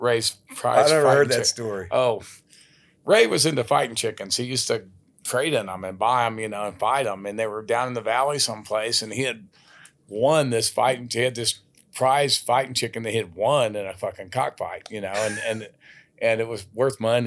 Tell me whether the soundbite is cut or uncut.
uncut